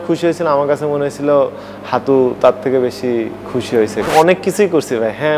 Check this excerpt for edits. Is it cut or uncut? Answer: cut